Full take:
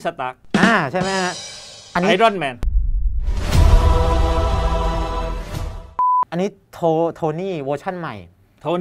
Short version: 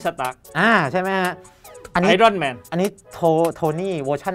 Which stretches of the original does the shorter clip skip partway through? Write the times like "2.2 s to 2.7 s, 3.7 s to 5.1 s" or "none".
2.7 s to 6.3 s